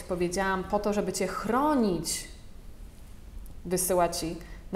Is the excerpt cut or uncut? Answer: uncut